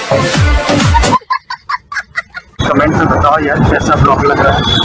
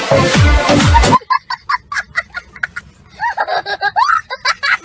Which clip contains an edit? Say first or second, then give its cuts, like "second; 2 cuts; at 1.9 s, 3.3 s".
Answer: first; 1 cut; at 2.6 s